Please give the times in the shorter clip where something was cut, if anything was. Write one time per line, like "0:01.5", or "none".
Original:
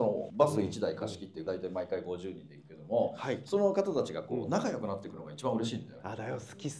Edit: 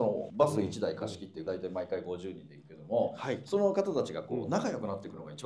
none